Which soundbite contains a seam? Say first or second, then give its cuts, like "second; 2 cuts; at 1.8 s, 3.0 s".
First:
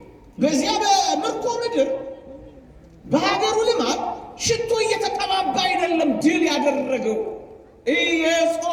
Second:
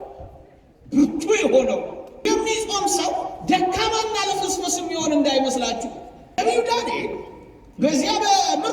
second; 2 cuts; at 2.3 s, 6.4 s